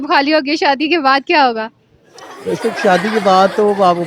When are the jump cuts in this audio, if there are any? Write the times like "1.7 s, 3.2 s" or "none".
none